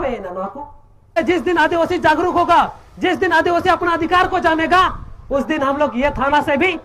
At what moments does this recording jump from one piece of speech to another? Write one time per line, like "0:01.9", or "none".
0:01.2